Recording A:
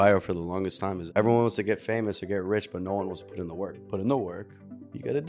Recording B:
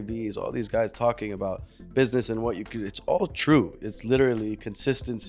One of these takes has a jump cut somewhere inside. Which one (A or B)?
A